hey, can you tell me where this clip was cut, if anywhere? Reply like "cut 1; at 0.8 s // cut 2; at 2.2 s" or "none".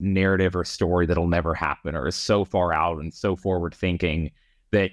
none